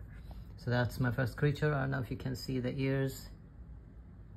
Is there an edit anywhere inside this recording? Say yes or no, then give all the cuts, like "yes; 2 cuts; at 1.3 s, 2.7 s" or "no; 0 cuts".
no; 0 cuts